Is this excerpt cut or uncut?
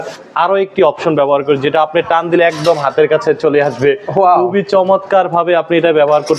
uncut